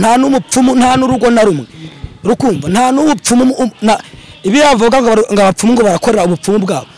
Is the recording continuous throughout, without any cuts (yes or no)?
yes